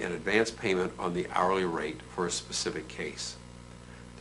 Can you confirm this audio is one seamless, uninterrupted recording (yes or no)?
no